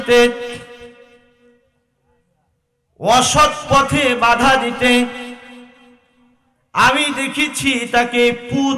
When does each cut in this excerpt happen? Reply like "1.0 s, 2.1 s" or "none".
none